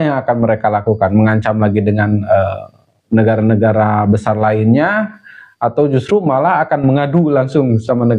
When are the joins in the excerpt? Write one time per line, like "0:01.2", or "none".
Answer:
none